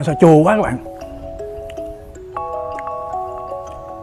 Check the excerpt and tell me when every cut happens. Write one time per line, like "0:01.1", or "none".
0:01.1